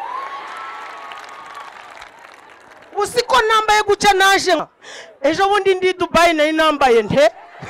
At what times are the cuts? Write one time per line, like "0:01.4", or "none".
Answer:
0:04.6